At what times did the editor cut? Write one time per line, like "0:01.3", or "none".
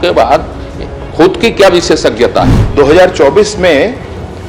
0:02.6